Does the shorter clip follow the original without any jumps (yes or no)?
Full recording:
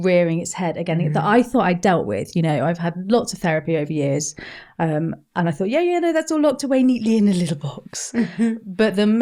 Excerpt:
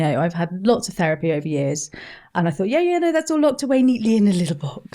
no